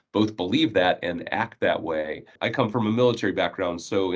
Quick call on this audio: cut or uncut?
cut